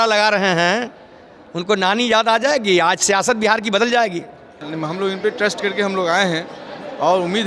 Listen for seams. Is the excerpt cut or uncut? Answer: cut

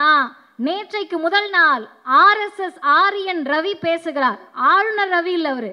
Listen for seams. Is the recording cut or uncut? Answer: uncut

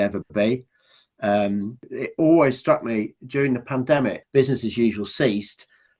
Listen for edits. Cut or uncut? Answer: cut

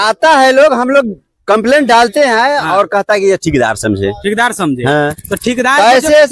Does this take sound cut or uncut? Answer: uncut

